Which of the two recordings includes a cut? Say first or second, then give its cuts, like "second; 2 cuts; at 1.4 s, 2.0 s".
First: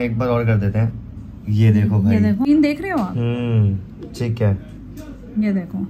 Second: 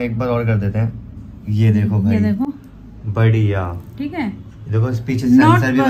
first; 1 cut; at 2.5 s